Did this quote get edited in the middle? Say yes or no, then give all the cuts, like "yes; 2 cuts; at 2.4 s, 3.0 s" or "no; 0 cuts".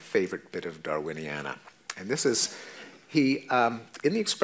no; 0 cuts